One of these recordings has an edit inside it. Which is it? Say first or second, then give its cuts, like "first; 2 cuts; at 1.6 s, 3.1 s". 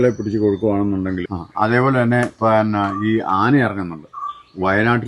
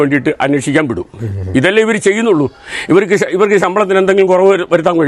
first; 1 cut; at 1.2 s